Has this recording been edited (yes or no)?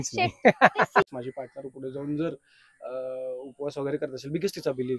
yes